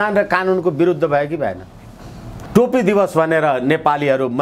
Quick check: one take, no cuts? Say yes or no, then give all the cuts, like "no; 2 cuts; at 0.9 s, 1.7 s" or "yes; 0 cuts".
no; 1 cut; at 2.4 s